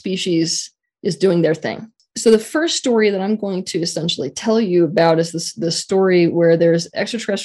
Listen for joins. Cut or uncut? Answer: cut